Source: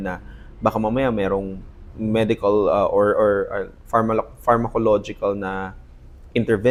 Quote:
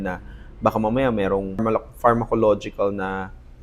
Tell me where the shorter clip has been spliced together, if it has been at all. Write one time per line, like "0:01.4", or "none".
0:01.6